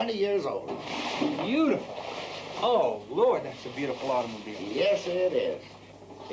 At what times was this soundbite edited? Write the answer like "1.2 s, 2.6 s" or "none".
2.4 s

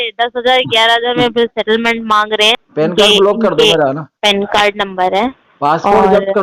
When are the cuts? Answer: 2.6 s

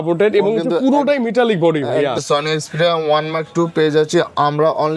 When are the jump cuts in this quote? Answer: 2.2 s

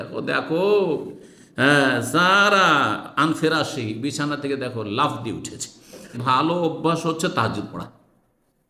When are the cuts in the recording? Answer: 6.2 s

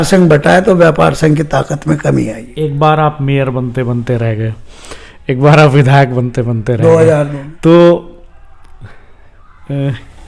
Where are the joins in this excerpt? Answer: 2.4 s, 7.4 s

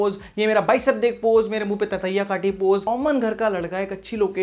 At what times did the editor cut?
2.9 s

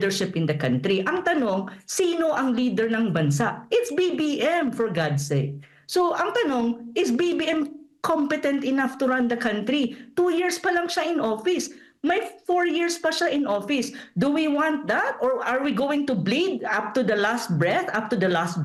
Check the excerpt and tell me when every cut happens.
none

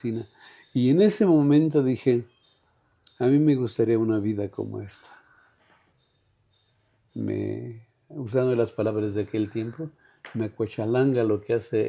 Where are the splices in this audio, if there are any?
none

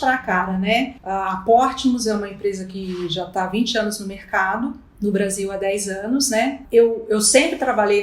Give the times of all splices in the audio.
1.0 s, 4.8 s, 6.6 s

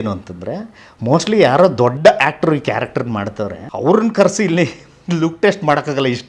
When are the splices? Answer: 3.6 s

